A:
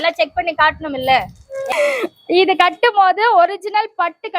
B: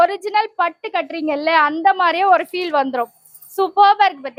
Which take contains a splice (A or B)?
A